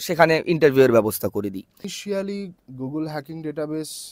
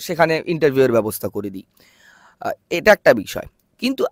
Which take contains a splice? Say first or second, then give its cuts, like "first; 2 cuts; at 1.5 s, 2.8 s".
first; 1 cut; at 1.9 s